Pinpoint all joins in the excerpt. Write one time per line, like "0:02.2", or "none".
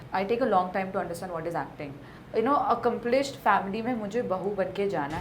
0:02.1